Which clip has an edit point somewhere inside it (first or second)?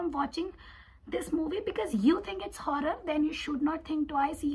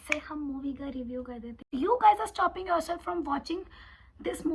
second